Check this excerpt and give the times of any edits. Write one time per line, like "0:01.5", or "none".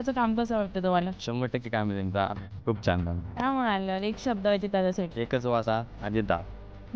0:01.2
0:03.2
0:05.2